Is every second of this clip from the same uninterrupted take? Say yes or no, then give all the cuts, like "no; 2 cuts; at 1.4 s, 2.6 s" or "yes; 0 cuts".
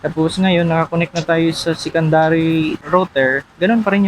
no; 1 cut; at 2.8 s